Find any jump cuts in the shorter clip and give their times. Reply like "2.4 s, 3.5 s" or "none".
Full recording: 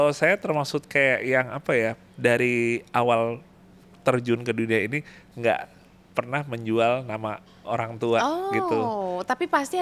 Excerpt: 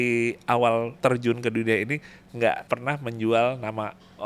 0.9 s, 2.6 s